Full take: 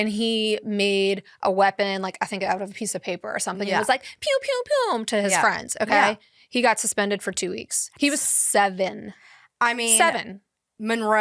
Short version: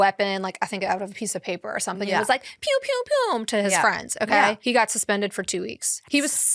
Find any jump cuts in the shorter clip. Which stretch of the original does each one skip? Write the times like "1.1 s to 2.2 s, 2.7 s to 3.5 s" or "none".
6.2 s to 6.5 s